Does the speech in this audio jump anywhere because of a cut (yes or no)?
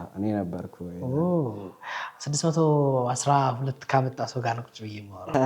no